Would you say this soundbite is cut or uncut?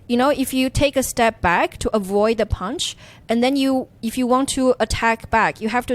cut